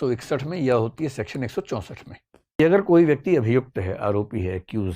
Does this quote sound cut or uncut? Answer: cut